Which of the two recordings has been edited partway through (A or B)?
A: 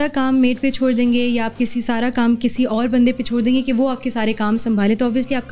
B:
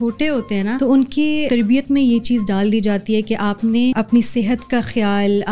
B